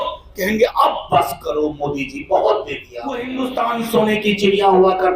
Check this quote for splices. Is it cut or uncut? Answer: cut